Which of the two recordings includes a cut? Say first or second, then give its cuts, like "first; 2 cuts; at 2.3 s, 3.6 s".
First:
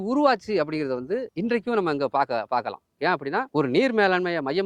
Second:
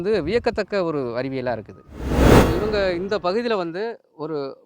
second; 2 cuts; at 2.1 s, 2.6 s